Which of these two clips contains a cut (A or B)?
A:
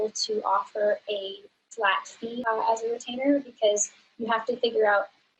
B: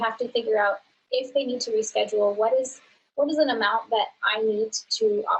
A